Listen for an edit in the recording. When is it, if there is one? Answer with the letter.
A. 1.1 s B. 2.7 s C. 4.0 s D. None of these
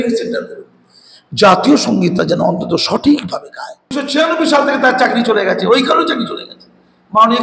C